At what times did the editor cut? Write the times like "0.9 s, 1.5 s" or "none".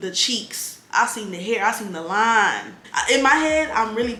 none

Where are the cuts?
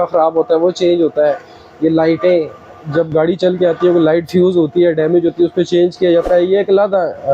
none

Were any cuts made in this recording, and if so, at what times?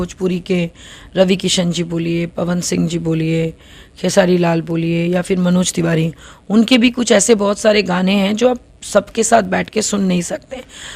none

